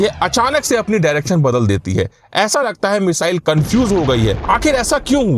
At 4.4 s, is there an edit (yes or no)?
yes